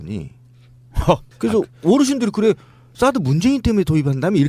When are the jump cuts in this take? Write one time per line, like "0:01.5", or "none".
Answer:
0:02.6